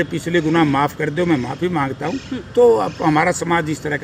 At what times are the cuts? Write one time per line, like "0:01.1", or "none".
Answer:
none